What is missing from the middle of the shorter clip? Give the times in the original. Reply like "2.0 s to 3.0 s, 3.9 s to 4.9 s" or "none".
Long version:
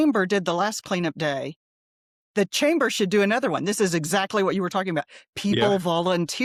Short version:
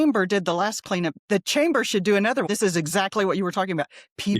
1.2 s to 2.2 s, 3.5 s to 3.6 s